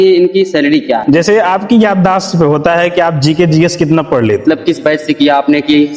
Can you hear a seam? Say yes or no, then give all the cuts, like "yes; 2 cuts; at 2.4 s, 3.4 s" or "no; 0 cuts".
yes; 2 cuts; at 1.0 s, 4.4 s